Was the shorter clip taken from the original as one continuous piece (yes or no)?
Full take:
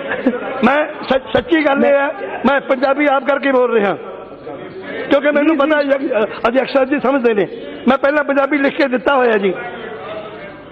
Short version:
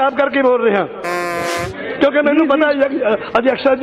yes